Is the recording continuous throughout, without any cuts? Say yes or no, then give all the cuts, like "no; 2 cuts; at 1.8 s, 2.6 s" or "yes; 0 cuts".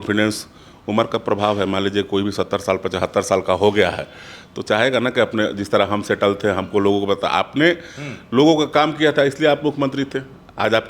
yes; 0 cuts